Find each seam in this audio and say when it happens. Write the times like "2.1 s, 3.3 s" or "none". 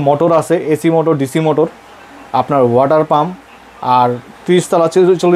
none